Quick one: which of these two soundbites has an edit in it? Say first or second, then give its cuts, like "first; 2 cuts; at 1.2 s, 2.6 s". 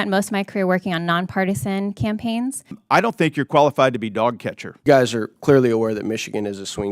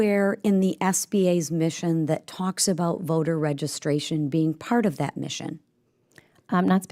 first; 2 cuts; at 2.8 s, 4.8 s